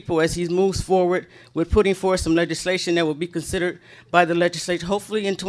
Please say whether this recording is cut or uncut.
uncut